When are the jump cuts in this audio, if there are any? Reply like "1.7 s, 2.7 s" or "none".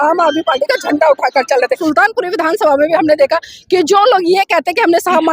1.8 s

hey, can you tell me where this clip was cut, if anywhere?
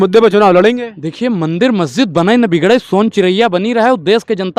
none

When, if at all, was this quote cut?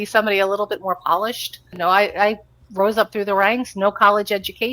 1.7 s

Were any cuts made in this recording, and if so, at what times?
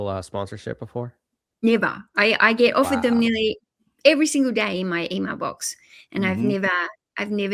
none

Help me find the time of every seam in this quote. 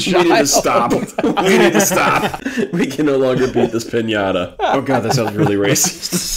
2.4 s, 4.8 s

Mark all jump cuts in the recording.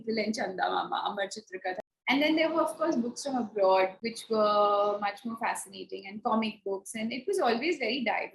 1.8 s, 4.1 s

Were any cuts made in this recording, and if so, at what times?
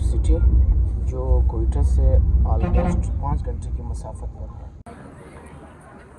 4.8 s

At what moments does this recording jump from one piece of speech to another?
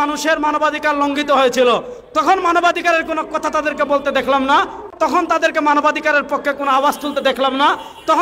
4.9 s

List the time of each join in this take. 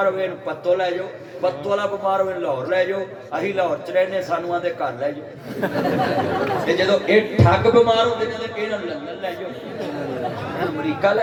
none

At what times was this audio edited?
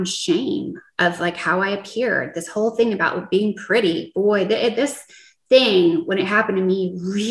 none

